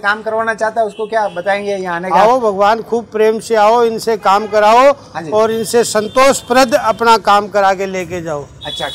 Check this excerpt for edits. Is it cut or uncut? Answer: uncut